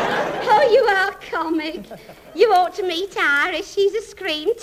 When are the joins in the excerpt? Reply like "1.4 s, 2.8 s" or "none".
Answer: none